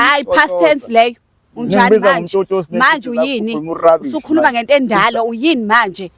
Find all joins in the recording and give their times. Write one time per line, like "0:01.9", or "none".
none

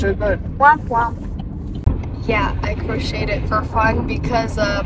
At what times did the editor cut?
0:01.8

